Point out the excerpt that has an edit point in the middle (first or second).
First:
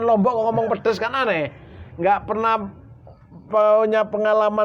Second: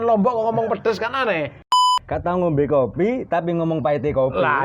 second